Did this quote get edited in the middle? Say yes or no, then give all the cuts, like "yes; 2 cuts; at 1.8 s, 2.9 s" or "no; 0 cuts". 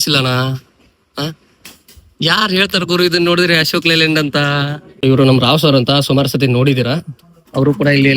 yes; 1 cut; at 4.8 s